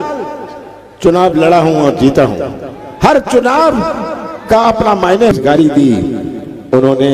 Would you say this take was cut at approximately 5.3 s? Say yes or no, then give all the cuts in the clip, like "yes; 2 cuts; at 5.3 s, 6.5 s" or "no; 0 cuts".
yes; 1 cut; at 5.3 s